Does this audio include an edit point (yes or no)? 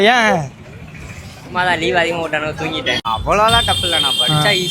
yes